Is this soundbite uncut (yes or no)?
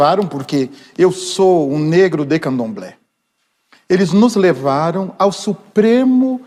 yes